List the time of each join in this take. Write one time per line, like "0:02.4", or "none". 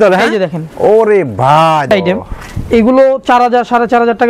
0:01.9